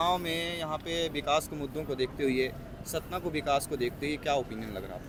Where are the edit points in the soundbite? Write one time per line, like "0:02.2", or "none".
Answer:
none